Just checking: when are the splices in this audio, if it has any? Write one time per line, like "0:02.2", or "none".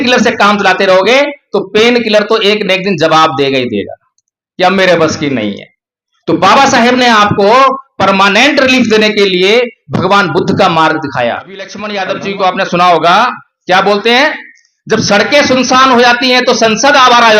0:11.8